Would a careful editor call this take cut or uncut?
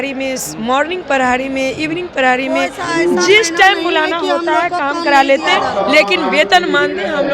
uncut